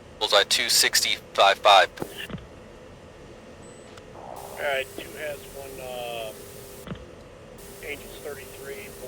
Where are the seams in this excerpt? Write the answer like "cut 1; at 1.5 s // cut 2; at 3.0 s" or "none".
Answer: cut 1; at 4.2 s